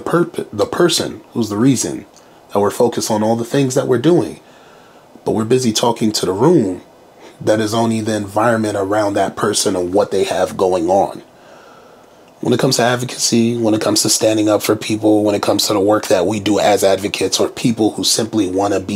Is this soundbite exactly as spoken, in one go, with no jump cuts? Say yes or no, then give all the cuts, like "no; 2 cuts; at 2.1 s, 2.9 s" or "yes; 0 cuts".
yes; 0 cuts